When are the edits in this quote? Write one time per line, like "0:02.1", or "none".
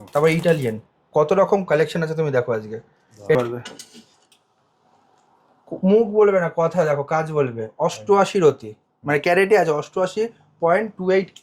0:03.4